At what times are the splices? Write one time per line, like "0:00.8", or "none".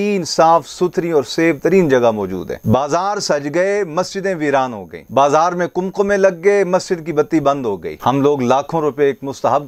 0:02.5
0:07.9